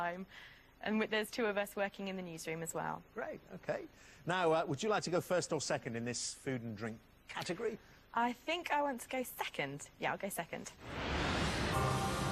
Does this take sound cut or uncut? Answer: cut